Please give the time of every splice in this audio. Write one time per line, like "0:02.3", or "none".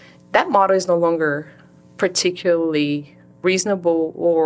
0:03.3